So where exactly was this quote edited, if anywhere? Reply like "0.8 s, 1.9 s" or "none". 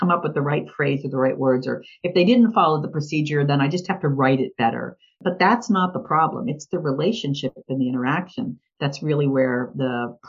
5.2 s